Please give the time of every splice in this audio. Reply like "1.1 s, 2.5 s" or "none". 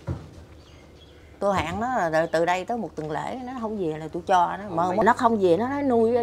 5.0 s